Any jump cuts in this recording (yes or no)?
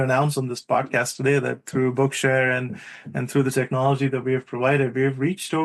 no